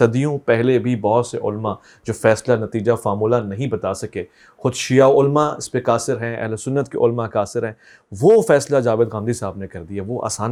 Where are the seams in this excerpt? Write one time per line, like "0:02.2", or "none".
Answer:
none